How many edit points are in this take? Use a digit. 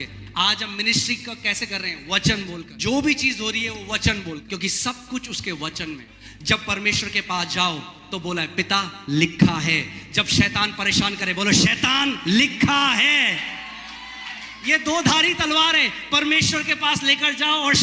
3